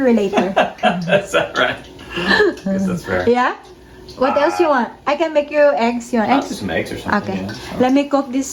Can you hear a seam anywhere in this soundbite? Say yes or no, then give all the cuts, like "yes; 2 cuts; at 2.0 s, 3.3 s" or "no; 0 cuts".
no; 0 cuts